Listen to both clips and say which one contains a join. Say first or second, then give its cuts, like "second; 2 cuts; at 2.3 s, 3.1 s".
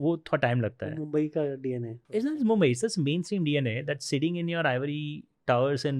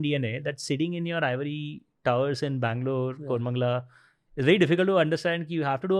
first; 1 cut; at 1.9 s